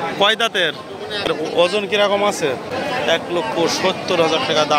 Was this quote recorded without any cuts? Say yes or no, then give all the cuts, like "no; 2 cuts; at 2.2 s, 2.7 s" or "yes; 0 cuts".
no; 2 cuts; at 1.3 s, 2.7 s